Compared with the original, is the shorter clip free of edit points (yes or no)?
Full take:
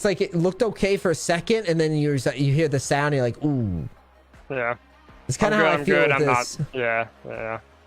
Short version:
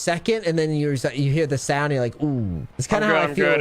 no